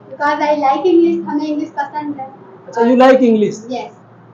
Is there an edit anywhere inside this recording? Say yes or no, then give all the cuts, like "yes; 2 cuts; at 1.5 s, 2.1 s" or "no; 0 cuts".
no; 0 cuts